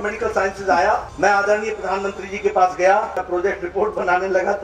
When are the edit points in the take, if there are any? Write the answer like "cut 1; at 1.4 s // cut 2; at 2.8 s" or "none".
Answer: cut 1; at 1.1 s // cut 2; at 3.2 s